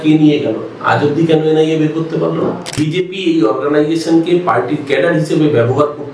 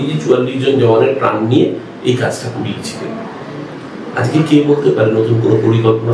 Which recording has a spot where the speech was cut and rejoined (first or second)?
first